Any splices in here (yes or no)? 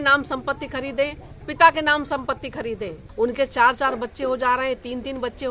yes